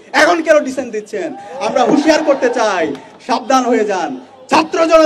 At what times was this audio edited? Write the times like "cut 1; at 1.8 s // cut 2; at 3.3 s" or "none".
none

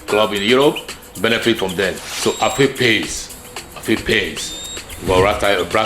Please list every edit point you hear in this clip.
cut 1; at 2.1 s

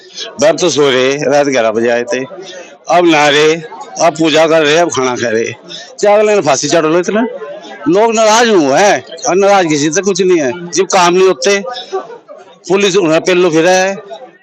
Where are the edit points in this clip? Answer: none

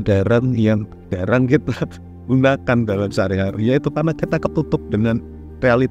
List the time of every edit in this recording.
cut 1; at 1.1 s

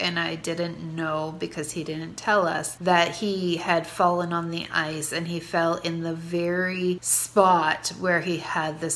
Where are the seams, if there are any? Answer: cut 1; at 2.7 s // cut 2; at 7.1 s

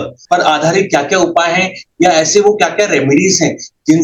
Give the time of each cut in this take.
none

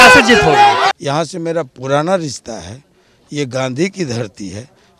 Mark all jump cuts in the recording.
cut 1; at 0.9 s

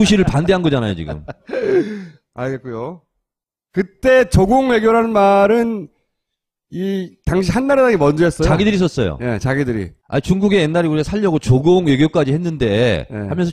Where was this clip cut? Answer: none

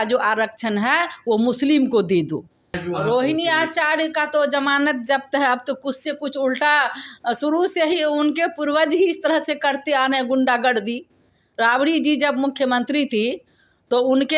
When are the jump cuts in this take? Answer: cut 1; at 2.8 s

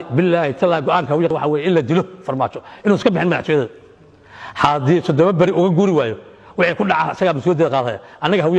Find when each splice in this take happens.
cut 1; at 1.3 s

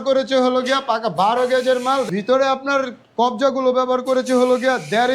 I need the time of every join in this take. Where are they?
cut 1; at 2.1 s

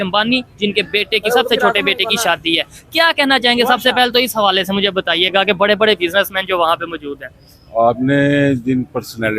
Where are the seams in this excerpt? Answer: none

